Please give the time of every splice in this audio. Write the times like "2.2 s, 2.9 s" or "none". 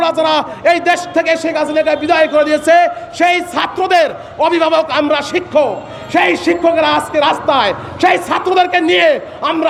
none